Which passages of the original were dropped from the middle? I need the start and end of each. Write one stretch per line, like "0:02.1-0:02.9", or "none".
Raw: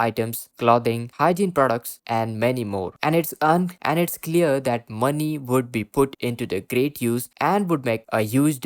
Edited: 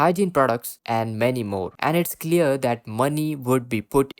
0:02.9-0:03.8